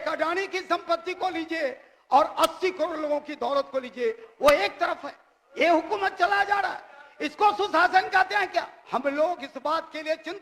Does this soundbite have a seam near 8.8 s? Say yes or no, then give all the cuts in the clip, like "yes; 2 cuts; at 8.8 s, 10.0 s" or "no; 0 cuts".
yes; 1 cut; at 8.8 s